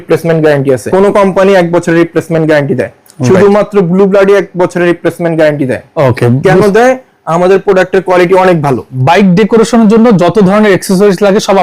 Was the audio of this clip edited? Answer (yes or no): yes